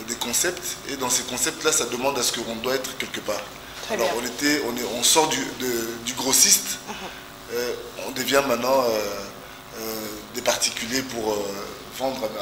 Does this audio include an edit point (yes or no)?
no